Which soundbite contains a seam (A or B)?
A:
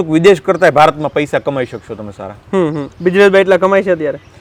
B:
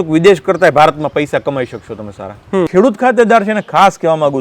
B